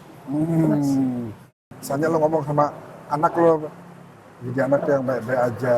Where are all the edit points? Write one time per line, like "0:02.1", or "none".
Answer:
0:01.7